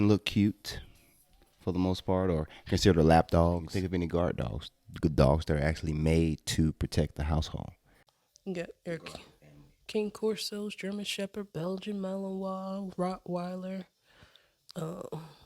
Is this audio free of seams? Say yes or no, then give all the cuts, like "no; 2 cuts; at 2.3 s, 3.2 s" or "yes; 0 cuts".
no; 1 cut; at 3.7 s